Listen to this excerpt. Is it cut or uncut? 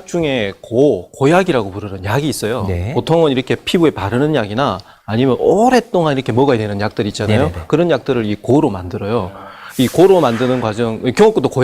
uncut